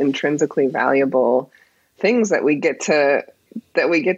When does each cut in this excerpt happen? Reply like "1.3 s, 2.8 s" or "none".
none